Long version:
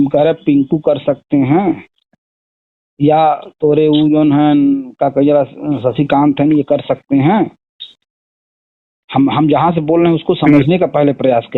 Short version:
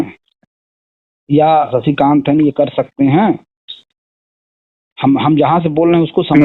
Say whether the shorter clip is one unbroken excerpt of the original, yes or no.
no